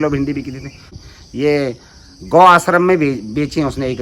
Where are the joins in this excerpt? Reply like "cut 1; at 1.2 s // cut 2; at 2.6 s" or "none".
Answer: cut 1; at 1.0 s